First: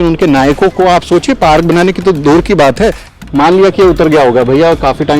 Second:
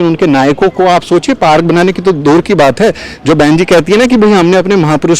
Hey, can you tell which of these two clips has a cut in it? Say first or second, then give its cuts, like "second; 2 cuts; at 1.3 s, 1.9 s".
first; 1 cut; at 3.1 s